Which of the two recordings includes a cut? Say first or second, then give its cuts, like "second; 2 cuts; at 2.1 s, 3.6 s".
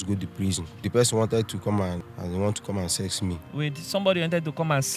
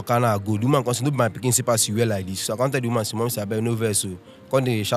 first; 3 cuts; at 0.8 s, 2.0 s, 2.9 s